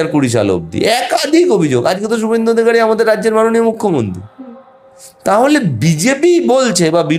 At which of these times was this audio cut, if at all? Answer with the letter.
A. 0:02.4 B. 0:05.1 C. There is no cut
C